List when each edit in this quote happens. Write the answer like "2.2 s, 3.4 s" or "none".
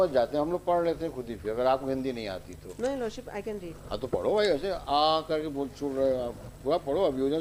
none